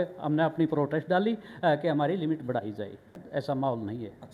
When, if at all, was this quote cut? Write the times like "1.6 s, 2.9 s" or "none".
3.2 s